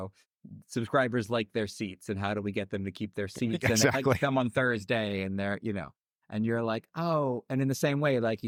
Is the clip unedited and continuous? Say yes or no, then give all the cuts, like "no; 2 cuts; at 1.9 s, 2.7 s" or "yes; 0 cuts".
yes; 0 cuts